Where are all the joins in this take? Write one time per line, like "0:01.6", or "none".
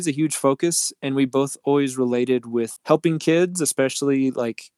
0:02.8

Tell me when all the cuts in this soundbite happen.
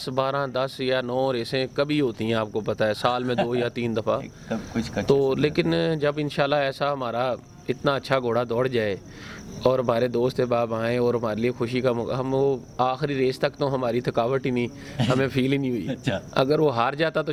none

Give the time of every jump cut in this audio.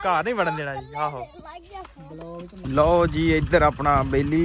0:02.5

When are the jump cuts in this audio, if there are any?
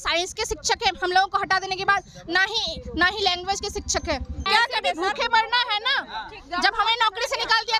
0:04.5

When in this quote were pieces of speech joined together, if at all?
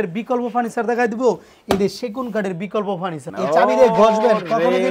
0:03.2

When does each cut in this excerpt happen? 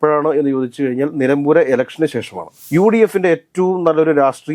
0:02.6

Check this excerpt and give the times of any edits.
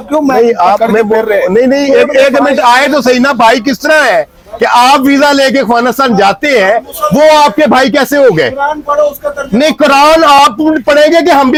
none

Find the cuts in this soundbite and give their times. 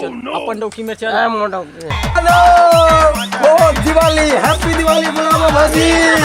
0:02.2

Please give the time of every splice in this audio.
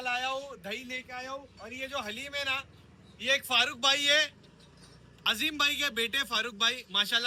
none

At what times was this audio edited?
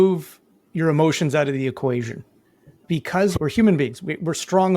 0:03.4

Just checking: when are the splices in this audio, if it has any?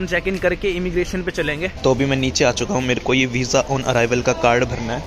0:01.7

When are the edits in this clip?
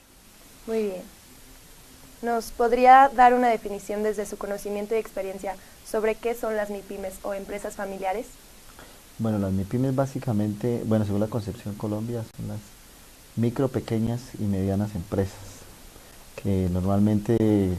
0:07.3

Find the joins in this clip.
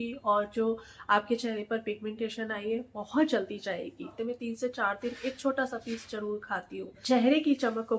0:04.1
0:06.9

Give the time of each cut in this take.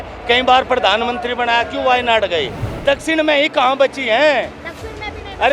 0:02.7

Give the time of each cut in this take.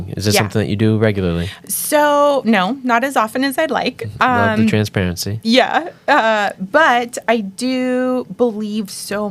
none

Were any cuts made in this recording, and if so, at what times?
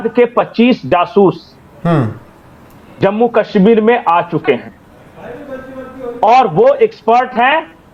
none

